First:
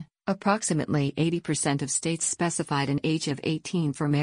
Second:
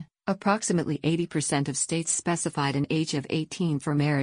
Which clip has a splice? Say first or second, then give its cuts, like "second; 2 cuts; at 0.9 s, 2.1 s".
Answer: second; 1 cut; at 0.9 s